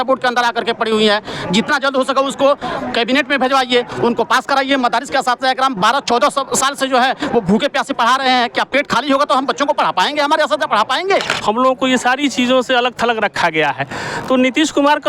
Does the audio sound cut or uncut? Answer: cut